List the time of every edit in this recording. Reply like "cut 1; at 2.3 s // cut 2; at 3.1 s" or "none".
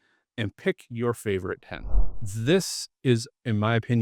cut 1; at 2.1 s